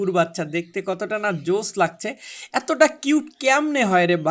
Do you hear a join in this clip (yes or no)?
no